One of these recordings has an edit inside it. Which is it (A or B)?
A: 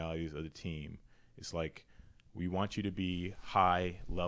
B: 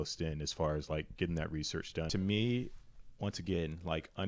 B